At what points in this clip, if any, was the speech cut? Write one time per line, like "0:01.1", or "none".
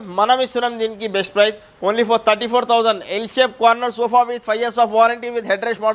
none